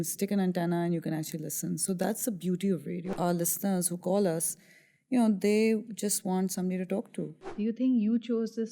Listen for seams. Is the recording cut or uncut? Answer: cut